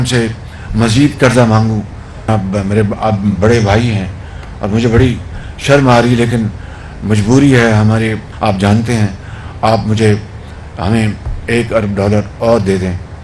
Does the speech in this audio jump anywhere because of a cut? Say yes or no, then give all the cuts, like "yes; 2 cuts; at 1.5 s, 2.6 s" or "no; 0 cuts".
yes; 2 cuts; at 2.3 s, 8.2 s